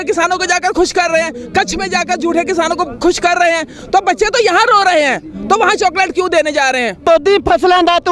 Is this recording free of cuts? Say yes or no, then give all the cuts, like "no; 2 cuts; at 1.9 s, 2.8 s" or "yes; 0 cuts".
no; 1 cut; at 7.1 s